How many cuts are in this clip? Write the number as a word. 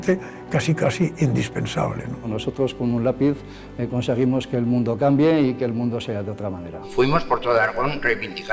two